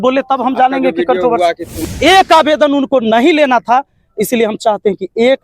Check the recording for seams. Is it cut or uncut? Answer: cut